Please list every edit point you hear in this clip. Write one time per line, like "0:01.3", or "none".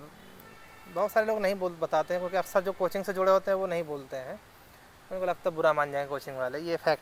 none